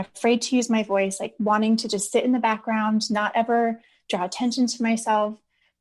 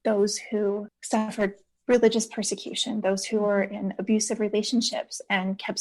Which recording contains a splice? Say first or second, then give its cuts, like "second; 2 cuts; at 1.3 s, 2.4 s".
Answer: second; 1 cut; at 0.9 s